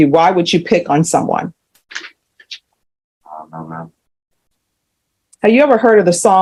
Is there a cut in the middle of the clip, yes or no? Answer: no